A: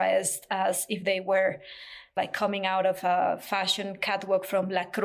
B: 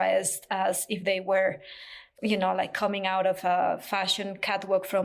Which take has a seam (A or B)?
A